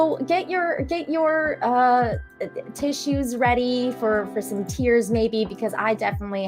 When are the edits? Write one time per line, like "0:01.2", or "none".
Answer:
none